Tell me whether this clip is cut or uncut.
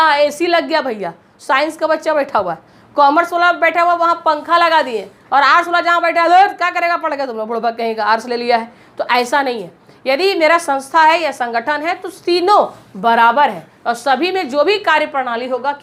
uncut